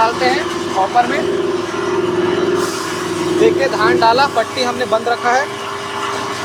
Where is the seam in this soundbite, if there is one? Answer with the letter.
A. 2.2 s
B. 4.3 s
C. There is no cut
C